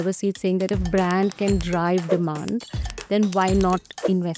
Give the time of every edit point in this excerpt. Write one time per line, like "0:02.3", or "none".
none